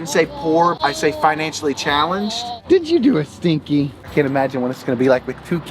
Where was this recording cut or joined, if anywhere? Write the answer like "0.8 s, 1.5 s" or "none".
0.8 s, 2.5 s, 4.0 s